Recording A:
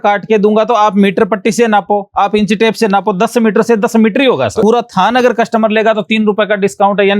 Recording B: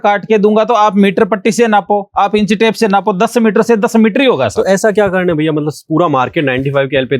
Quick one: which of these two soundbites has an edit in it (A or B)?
A